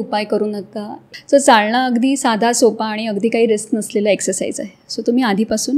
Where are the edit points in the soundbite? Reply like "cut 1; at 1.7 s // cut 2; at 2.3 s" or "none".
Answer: cut 1; at 0.9 s